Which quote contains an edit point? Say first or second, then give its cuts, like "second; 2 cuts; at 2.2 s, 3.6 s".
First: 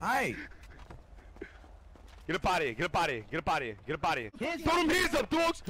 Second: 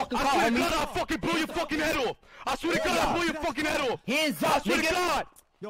first; 1 cut; at 4.4 s